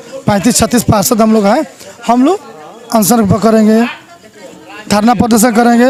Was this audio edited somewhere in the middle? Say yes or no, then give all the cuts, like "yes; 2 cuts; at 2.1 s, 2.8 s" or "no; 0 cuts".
no; 0 cuts